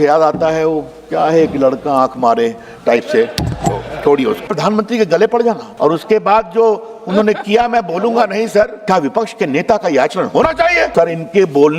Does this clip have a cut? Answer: yes; 4 cuts; at 4.5 s, 5.7 s, 8.8 s, 10.9 s

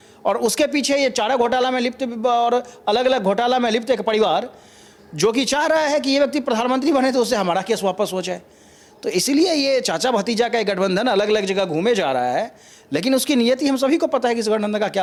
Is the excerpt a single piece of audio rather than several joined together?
yes; 0 cuts

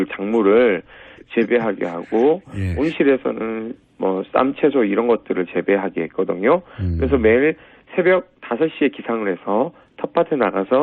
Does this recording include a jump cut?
yes; 1 cut; at 9.4 s

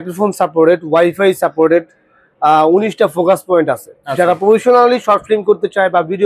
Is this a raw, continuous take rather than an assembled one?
yes; 0 cuts

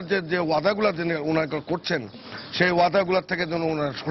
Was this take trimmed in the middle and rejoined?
no; 0 cuts

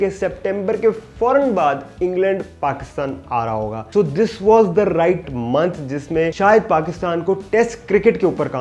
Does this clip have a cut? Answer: yes; 2 cuts; at 3.8 s, 5.3 s

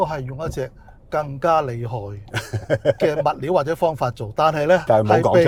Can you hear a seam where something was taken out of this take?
no; 0 cuts

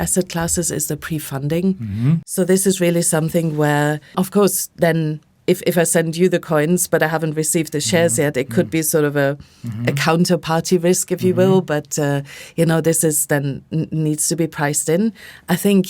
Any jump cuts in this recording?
yes; 2 cuts; at 2.3 s, 4.1 s

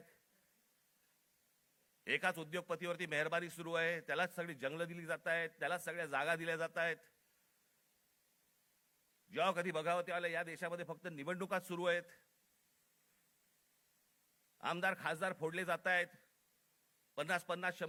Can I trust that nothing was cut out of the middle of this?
yes; 0 cuts

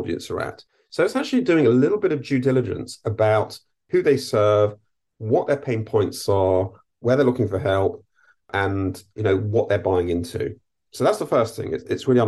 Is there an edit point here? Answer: no; 0 cuts

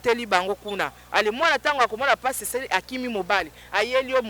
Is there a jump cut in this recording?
no; 0 cuts

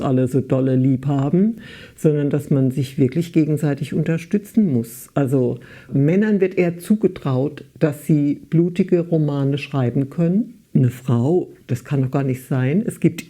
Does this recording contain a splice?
yes; 1 cut; at 10.6 s

